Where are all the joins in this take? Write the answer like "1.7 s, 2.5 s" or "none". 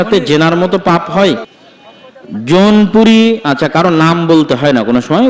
1.5 s